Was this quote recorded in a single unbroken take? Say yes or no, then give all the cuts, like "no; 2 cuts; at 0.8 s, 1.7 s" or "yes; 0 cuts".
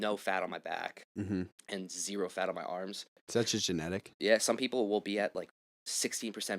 no; 1 cut; at 3.2 s